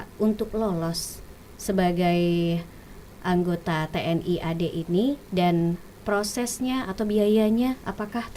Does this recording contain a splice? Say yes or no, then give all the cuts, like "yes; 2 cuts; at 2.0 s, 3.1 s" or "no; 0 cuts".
no; 0 cuts